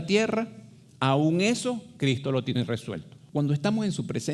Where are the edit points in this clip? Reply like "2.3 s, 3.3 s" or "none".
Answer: 3.1 s